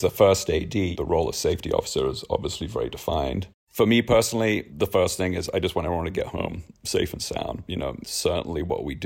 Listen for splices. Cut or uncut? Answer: cut